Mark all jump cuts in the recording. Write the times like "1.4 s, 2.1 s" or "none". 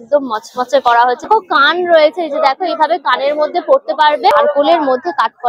1.3 s, 4.3 s